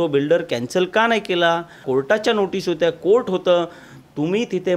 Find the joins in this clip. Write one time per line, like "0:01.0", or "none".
0:01.8